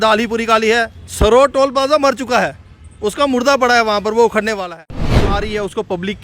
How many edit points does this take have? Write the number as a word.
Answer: two